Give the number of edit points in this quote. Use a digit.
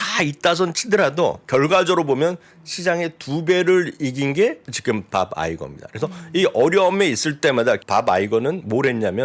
2